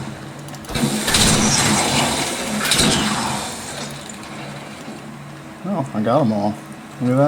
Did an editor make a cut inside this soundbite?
no; 0 cuts

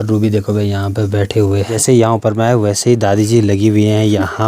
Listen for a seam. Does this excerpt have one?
yes; 1 cut; at 1.7 s

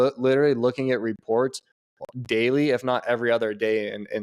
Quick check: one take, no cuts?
yes; 0 cuts

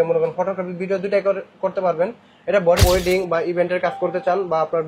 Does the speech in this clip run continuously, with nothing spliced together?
no; 1 cut; at 2.8 s

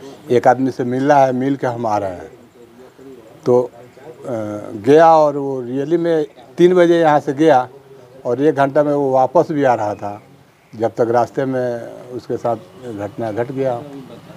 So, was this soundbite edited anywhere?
no; 0 cuts

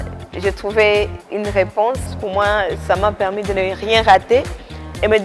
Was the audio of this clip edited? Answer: yes; 2 cuts; at 1.2 s, 2.2 s

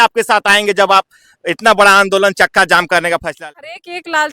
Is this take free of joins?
no; 1 cut; at 3.4 s

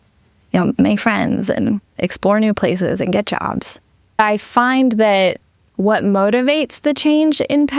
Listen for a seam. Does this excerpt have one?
yes; 1 cut; at 4.2 s

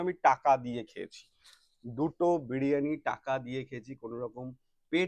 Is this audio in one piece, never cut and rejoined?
yes; 0 cuts

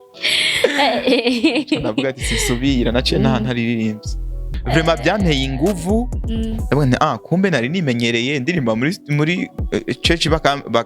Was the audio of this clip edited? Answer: yes; 1 cut; at 4.5 s

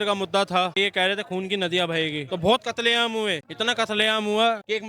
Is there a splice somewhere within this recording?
yes; 3 cuts; at 0.8 s, 2.2 s, 3.5 s

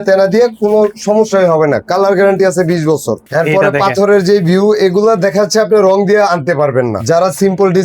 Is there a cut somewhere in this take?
yes; 2 cuts; at 3.2 s, 7.0 s

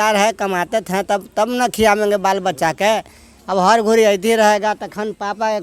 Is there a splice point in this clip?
no; 0 cuts

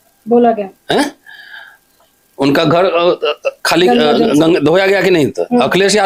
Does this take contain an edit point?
no; 0 cuts

